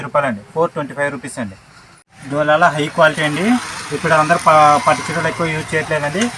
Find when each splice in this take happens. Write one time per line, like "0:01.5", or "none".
none